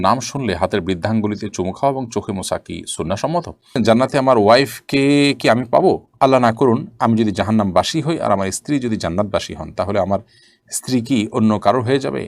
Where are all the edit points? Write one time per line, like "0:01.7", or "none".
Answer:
0:03.7